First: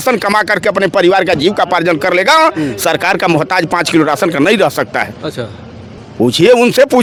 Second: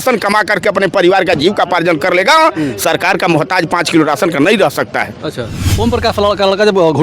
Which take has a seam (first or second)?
second